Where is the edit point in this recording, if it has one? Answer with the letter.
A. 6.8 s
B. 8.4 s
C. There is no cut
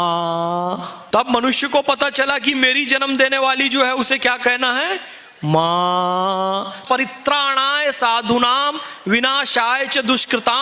A